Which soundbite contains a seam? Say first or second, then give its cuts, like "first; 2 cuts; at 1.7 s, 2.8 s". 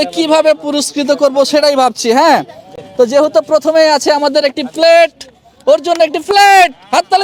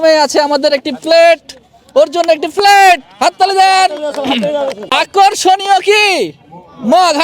second; 1 cut; at 5.0 s